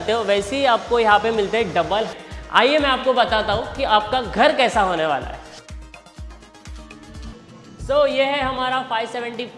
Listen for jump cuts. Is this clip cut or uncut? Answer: cut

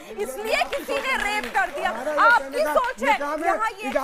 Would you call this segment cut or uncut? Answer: uncut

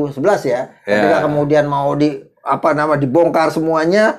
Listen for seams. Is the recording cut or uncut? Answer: uncut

